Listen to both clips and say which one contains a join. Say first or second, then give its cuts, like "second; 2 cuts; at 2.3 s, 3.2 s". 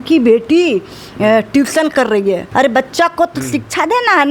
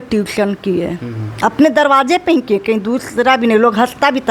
first; 1 cut; at 2.4 s